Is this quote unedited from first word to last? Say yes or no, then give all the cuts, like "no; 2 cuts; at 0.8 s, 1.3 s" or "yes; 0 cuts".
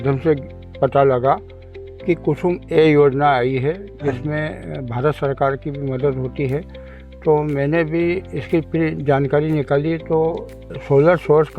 yes; 0 cuts